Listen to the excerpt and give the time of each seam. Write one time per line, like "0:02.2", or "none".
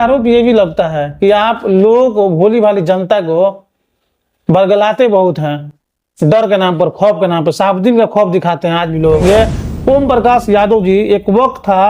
0:09.2